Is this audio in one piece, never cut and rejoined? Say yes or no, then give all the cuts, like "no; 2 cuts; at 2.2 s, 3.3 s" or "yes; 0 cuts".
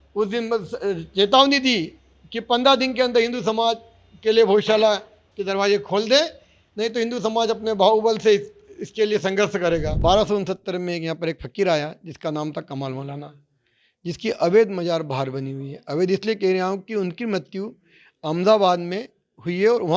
no; 1 cut; at 9.9 s